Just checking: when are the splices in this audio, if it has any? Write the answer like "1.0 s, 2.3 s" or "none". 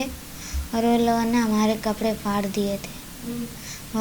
none

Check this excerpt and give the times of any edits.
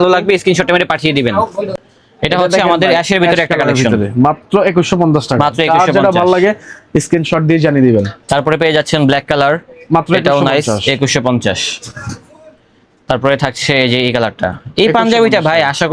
none

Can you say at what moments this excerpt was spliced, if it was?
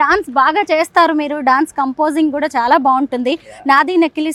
none

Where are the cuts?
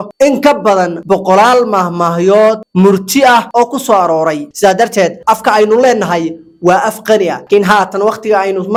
none

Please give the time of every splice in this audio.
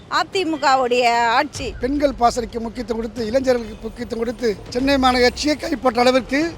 1.7 s, 4.6 s

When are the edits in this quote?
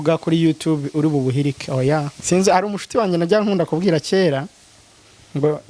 2.1 s

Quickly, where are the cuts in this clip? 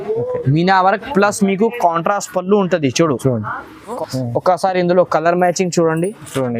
4.0 s

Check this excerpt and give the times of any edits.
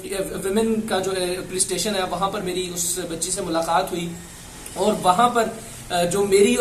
none

